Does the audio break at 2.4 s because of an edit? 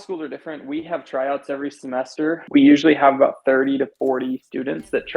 yes; 1 cut; at 2.4 s

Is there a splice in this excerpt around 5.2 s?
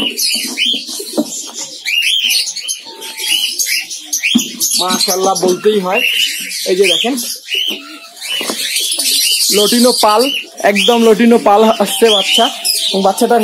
no; 0 cuts

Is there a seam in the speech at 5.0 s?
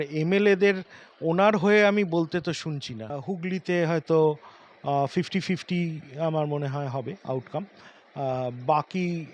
no; 1 cut; at 3.2 s

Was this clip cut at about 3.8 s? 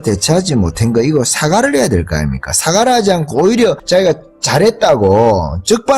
yes; 1 cut; at 3.8 s

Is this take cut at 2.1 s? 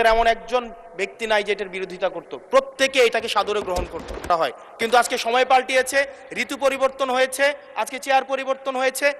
no; 1 cut; at 4.3 s

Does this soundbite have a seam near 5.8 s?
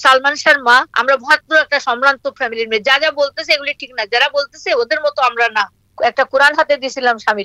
yes; 2 cuts; at 0.9 s, 5.8 s

